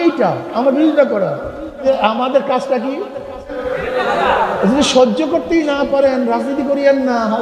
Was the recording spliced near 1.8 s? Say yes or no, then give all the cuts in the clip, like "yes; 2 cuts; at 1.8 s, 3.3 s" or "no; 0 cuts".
yes; 2 cuts; at 1.8 s, 3.7 s